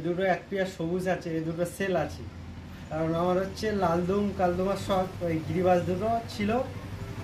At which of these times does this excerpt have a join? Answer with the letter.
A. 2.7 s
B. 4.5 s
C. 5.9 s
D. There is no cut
D